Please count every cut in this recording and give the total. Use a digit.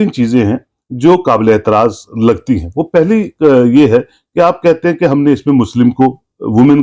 0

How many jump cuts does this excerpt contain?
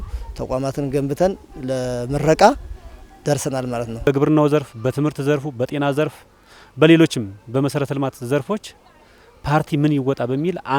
1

